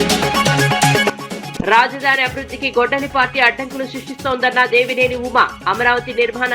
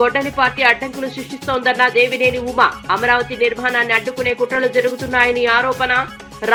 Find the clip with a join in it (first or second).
first